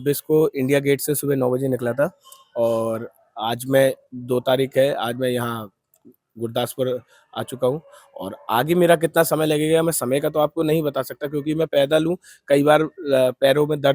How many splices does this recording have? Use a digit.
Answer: 0